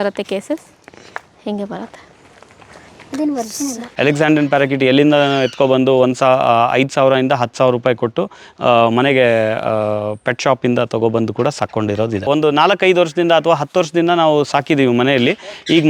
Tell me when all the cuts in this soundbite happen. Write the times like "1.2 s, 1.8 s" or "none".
3.8 s, 12.2 s